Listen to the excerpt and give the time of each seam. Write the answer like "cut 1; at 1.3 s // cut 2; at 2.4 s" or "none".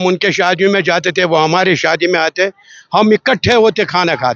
none